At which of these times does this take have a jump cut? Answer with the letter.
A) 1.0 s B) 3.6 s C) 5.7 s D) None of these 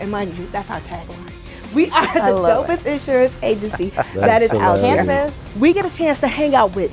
C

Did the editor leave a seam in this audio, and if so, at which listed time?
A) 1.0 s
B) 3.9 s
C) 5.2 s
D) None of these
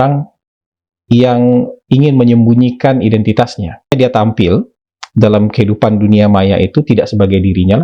B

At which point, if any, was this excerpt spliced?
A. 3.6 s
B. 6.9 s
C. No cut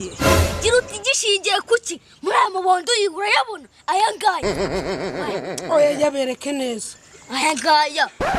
C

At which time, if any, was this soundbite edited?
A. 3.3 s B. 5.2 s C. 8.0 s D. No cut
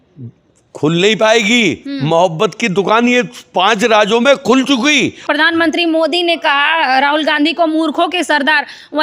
B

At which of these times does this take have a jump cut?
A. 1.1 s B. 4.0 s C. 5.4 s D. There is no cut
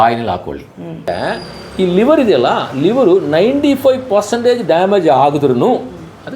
A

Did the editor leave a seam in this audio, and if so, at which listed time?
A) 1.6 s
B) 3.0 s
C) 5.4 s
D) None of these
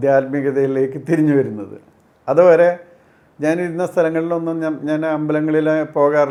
D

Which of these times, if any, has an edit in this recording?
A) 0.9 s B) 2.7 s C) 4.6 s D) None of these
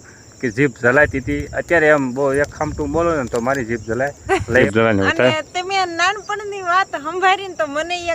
C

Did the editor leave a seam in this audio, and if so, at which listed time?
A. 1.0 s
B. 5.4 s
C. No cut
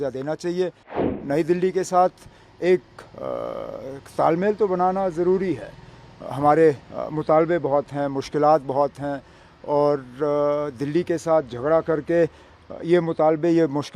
A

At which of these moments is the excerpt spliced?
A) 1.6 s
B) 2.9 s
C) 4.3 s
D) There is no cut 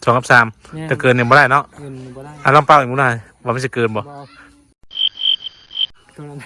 D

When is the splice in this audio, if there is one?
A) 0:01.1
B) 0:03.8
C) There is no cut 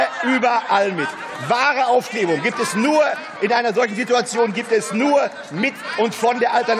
C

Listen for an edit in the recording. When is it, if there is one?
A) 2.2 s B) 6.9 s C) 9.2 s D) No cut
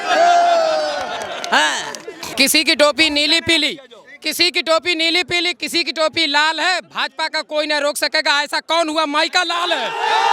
A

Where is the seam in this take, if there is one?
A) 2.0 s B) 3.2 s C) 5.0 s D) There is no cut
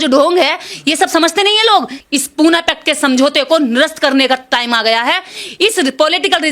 A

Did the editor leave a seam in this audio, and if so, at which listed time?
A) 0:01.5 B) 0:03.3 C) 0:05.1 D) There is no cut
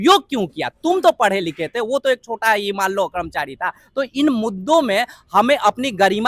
D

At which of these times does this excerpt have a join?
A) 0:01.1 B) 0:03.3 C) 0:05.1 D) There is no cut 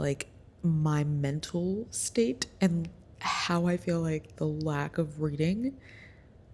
D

